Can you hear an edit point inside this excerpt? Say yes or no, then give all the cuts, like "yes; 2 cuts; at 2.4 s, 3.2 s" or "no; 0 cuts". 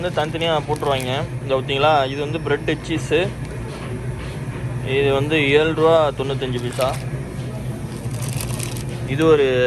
no; 0 cuts